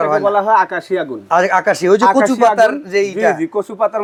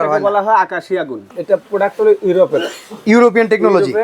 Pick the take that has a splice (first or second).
second